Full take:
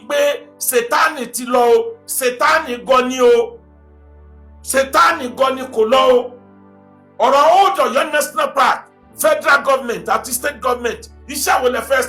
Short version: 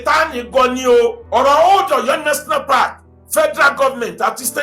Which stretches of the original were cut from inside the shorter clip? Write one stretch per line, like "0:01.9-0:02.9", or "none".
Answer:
0:03.5-0:07.1